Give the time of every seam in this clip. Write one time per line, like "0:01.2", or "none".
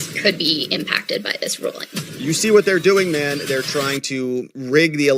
0:02.1